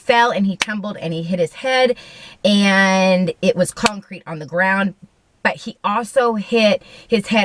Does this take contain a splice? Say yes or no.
no